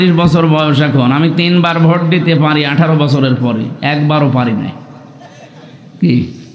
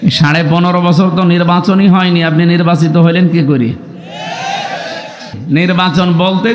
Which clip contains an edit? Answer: second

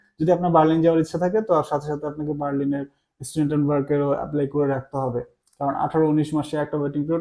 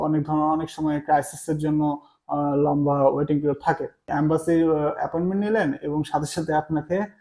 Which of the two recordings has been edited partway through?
second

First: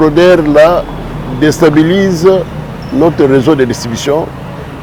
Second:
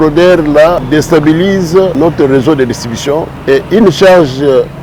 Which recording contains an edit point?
second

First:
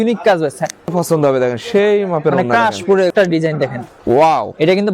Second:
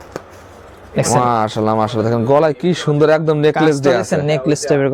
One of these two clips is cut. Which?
first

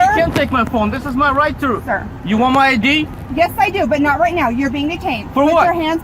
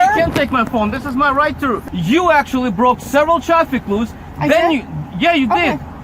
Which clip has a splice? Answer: second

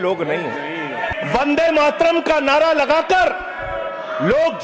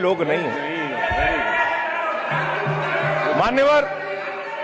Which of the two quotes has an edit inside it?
first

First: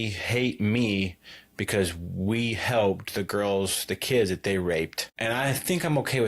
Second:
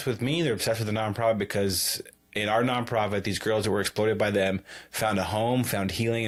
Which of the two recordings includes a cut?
first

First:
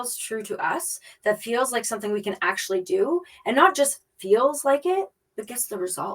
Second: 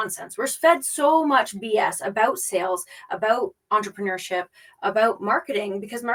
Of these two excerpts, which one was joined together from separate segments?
first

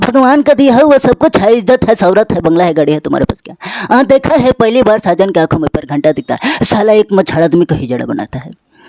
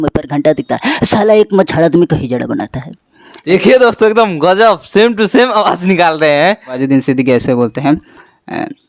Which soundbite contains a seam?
second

